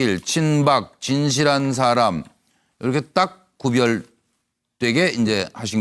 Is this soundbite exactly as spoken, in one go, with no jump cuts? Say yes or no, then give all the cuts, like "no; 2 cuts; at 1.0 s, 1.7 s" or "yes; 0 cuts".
yes; 0 cuts